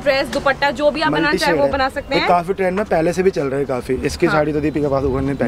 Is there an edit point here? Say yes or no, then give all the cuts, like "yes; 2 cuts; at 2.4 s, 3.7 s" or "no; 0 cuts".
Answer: no; 0 cuts